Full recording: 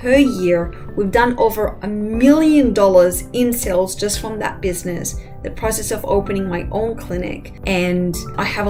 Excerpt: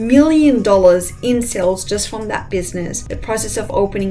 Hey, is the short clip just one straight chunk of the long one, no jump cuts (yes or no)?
no